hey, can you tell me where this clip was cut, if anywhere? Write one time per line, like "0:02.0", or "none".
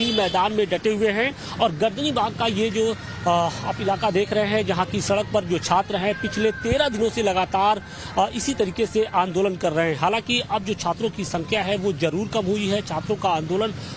0:01.7